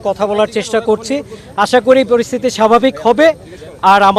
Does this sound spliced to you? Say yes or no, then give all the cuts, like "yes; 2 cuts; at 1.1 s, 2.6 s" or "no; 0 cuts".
no; 0 cuts